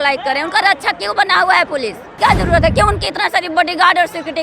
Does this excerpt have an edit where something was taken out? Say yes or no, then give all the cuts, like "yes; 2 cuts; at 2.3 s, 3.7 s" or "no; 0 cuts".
yes; 1 cut; at 2.1 s